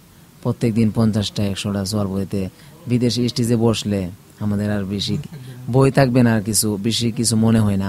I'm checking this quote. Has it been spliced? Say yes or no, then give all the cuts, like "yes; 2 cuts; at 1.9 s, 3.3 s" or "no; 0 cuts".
no; 0 cuts